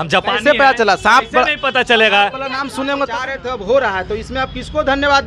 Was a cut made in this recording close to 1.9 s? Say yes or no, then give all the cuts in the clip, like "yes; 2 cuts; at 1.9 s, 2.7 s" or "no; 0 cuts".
no; 1 cut; at 3.4 s